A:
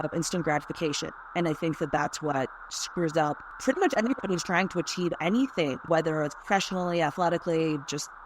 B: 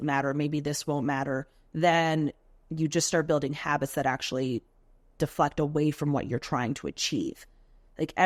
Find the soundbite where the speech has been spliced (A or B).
A